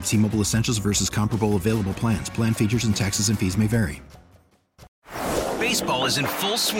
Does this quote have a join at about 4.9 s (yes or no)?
yes